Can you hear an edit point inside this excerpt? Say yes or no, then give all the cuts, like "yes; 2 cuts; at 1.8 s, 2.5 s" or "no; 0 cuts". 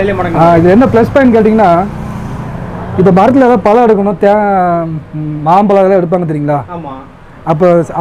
no; 0 cuts